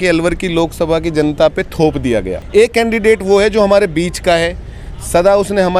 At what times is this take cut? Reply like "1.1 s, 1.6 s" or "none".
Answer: 2.4 s